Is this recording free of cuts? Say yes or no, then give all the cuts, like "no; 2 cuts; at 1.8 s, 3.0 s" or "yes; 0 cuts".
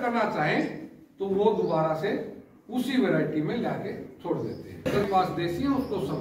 no; 1 cut; at 4.9 s